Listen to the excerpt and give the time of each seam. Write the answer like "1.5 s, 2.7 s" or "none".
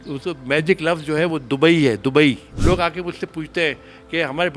2.5 s